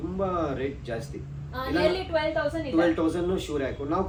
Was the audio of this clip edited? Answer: no; 0 cuts

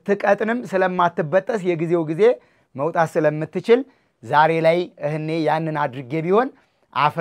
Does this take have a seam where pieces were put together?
no; 0 cuts

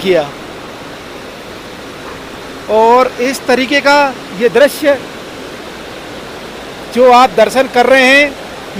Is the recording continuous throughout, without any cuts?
yes; 0 cuts

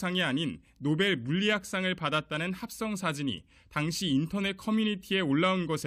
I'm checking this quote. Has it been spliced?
no; 0 cuts

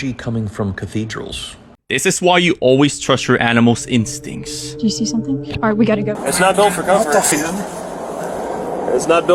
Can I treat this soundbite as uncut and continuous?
no; 2 cuts; at 1.8 s, 6.2 s

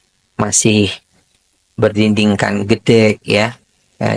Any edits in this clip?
no; 0 cuts

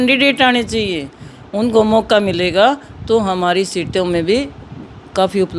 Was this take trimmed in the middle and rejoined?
no; 0 cuts

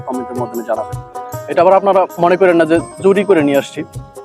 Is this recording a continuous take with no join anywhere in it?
no; 1 cut; at 1.0 s

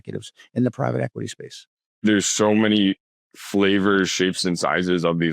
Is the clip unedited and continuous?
no; 1 cut; at 2.0 s

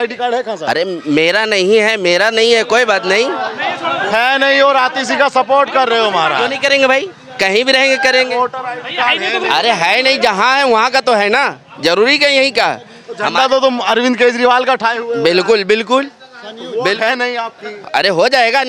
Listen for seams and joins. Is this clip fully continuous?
yes; 0 cuts

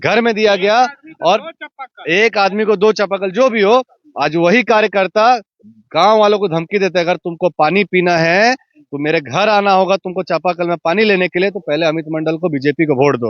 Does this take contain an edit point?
no; 0 cuts

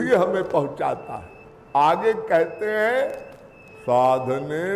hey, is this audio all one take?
no; 1 cut; at 1.4 s

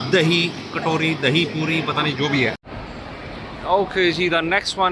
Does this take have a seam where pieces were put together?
yes; 1 cut; at 2.6 s

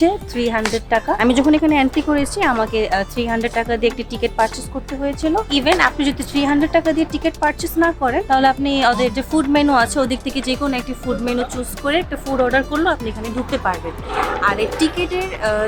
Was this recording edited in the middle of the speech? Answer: no; 0 cuts

